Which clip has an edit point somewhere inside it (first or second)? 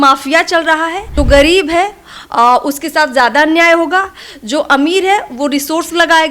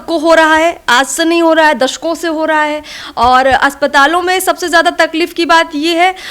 first